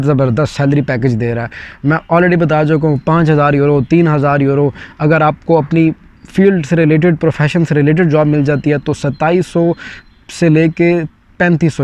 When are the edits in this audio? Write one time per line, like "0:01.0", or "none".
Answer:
none